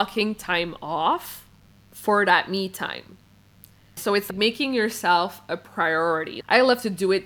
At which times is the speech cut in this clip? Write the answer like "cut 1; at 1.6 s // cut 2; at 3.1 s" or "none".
cut 1; at 4.2 s // cut 2; at 6.3 s